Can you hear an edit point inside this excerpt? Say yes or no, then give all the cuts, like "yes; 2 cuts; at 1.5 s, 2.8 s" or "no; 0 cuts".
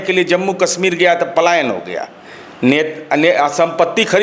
no; 0 cuts